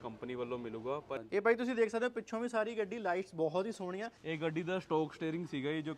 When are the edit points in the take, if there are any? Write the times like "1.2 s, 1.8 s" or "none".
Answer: 1.2 s, 4.2 s